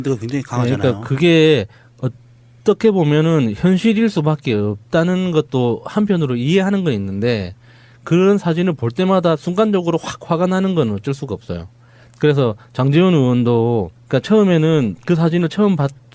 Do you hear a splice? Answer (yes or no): no